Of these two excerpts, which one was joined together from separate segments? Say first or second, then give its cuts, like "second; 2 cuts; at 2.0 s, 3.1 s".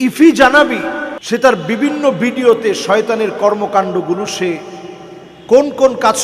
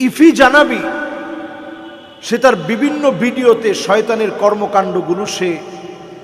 first; 1 cut; at 1.1 s